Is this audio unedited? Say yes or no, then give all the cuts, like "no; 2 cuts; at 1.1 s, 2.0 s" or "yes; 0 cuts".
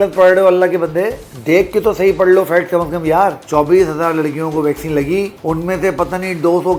no; 2 cuts; at 1.2 s, 3.4 s